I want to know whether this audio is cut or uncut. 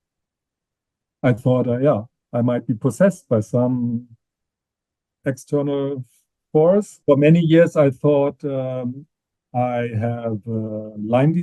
cut